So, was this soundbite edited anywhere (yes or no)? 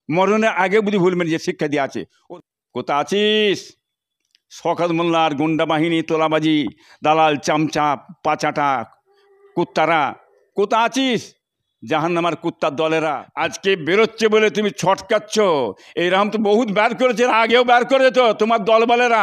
yes